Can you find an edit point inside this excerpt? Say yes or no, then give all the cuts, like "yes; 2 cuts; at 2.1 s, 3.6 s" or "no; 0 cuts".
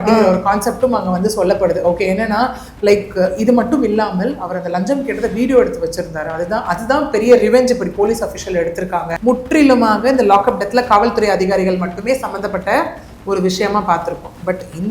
yes; 1 cut; at 9.1 s